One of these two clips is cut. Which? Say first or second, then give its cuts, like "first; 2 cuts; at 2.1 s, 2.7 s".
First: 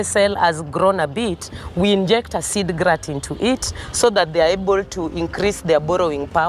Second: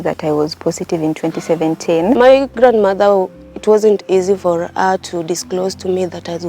second; 1 cut; at 2.2 s